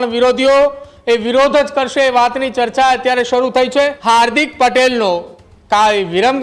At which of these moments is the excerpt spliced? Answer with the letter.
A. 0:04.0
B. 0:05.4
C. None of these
A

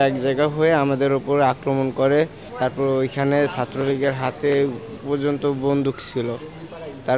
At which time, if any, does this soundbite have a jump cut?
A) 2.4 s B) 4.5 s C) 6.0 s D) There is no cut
A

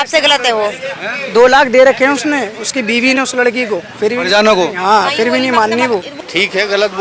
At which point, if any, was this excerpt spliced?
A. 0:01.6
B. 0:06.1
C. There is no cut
B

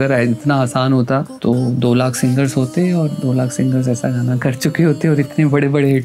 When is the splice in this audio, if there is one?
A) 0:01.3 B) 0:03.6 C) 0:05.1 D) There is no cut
A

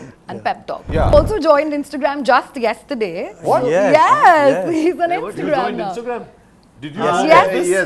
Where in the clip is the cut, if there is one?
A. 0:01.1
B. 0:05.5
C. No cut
A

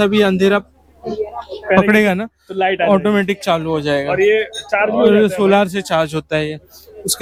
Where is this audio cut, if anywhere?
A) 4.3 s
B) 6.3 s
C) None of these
C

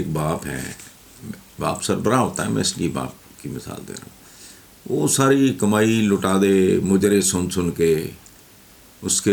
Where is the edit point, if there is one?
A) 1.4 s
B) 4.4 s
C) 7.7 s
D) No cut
D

